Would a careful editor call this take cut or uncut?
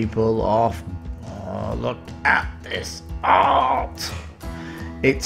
cut